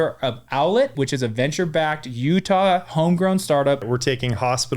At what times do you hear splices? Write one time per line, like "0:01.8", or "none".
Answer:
0:00.9
0:03.8